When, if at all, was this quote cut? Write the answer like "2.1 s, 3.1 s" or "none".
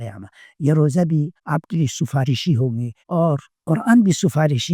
1.4 s, 3.3 s